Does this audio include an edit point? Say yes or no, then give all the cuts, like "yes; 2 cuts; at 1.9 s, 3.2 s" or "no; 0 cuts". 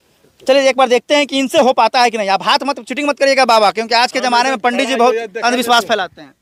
no; 0 cuts